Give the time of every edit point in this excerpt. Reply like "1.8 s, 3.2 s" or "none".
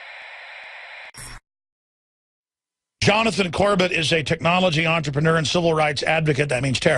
1.1 s